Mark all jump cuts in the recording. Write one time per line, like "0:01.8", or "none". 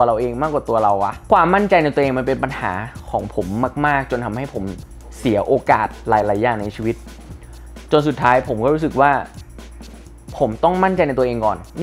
0:01.3